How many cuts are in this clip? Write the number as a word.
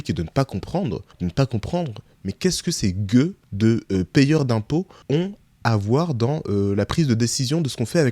three